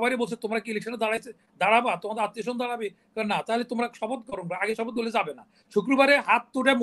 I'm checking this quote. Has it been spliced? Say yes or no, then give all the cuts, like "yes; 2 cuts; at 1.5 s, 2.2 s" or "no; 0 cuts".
no; 0 cuts